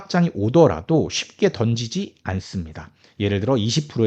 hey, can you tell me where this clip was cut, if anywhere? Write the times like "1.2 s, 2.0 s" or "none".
none